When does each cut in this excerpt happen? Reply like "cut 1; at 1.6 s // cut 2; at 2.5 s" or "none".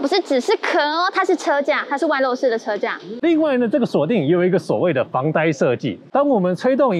cut 1; at 3.0 s